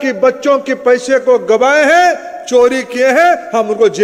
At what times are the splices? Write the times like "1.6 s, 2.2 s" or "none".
none